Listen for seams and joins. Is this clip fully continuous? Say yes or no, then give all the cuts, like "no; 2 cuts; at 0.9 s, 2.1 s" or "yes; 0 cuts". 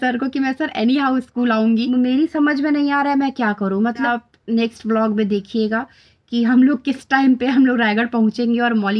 no; 2 cuts; at 1.9 s, 4.1 s